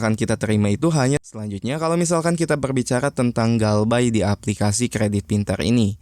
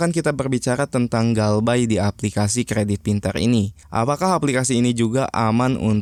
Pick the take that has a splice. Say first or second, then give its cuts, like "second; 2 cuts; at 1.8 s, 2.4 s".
first; 1 cut; at 1.3 s